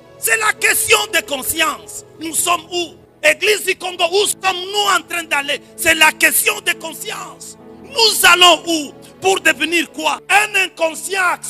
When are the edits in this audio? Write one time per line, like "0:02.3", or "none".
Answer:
0:03.0
0:10.2